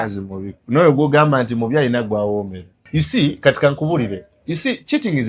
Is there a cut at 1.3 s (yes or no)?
no